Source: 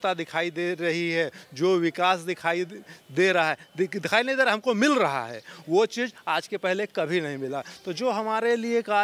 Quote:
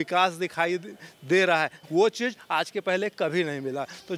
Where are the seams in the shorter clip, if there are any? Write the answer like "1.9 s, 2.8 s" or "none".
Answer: 1.8 s

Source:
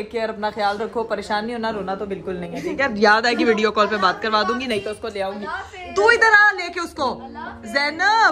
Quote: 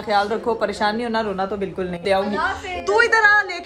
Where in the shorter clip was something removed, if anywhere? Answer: 2.0 s

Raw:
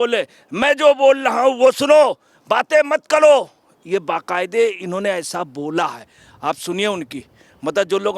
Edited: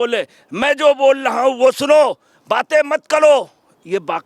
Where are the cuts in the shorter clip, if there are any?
none

